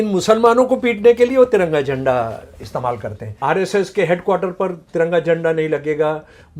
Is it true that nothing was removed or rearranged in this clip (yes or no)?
no